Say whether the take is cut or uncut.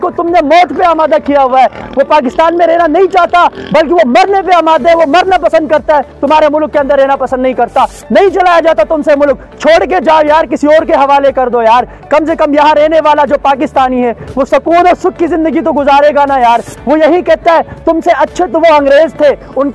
uncut